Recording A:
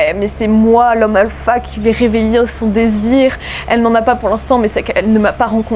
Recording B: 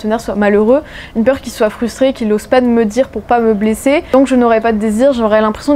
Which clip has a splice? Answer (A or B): B